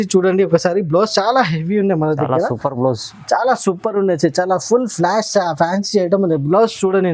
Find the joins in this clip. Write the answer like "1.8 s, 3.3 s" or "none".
none